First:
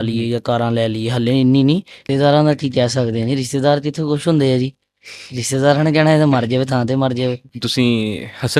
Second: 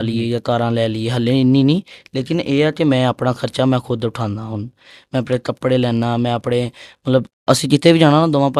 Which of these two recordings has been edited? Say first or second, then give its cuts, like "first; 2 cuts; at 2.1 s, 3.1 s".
first; 2 cuts; at 2.0 s, 7.5 s